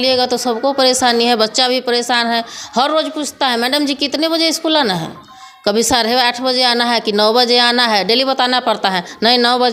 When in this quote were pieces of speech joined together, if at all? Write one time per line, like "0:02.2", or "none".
none